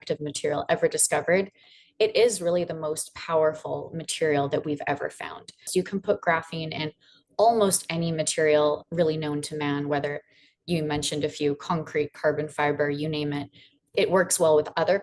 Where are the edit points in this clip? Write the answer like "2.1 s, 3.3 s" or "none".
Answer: 1.7 s, 5.7 s